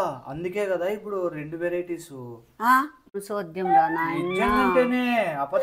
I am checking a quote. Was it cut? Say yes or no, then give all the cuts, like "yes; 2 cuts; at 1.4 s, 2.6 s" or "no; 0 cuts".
yes; 1 cut; at 3.2 s